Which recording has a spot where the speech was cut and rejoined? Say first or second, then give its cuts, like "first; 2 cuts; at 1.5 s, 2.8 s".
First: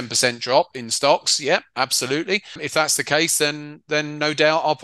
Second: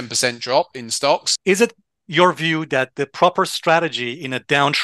second; 1 cut; at 1.3 s